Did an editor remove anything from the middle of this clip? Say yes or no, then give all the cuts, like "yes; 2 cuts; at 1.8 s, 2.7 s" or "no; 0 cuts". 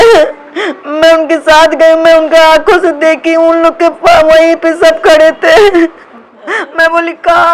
yes; 1 cut; at 6.3 s